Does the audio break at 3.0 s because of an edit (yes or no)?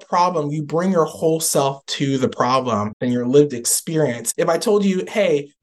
yes